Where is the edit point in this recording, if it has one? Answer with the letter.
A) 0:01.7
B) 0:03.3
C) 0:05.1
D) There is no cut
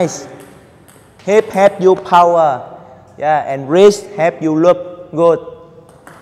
D